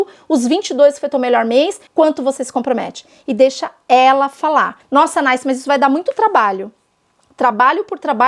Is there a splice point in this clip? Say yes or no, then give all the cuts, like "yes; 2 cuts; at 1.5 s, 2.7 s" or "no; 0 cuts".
yes; 2 cuts; at 1.8 s, 4.8 s